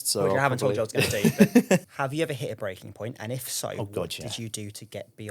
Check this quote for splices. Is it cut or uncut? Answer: cut